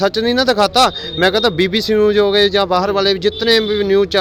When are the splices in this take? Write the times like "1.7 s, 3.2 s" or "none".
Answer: none